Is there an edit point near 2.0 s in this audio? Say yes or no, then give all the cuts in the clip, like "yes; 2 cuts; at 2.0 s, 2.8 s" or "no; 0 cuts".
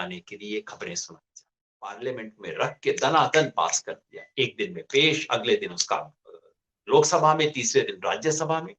yes; 1 cut; at 2.0 s